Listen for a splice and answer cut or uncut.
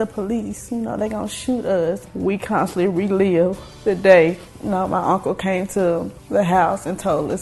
cut